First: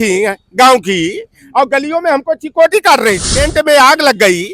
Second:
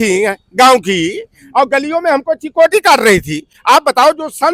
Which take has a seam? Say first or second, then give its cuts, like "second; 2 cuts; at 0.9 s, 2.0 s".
first; 1 cut; at 3.4 s